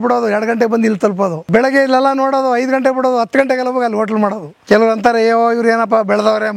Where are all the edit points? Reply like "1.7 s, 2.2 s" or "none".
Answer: 1.5 s, 4.5 s